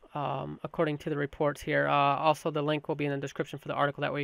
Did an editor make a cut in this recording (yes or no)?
no